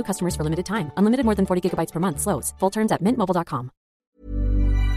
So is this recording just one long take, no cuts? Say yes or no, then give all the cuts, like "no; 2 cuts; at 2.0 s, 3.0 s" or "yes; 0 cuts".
no; 1 cut; at 4.0 s